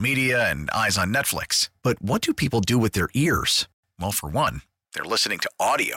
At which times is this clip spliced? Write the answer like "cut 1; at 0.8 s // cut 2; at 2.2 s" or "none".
none

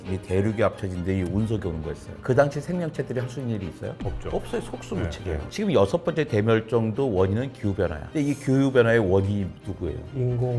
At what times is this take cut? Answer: none

